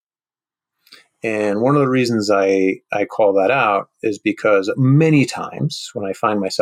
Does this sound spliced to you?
no; 0 cuts

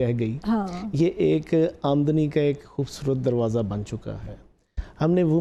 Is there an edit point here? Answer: no; 0 cuts

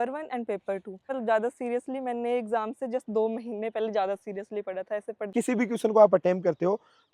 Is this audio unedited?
no; 2 cuts; at 1.1 s, 5.3 s

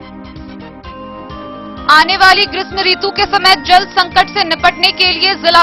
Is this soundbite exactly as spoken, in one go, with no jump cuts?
no; 1 cut; at 1.7 s

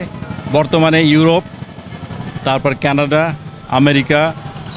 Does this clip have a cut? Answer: no; 0 cuts

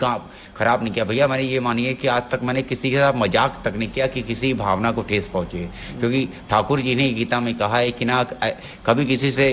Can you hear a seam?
no; 0 cuts

